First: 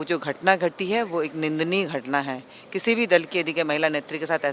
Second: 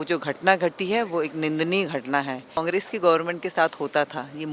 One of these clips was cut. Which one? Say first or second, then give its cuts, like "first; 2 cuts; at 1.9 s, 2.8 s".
second; 1 cut; at 2.6 s